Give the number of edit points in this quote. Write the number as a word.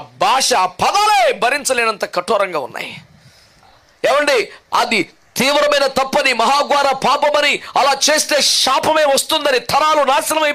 one